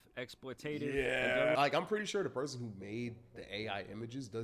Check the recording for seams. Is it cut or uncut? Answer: cut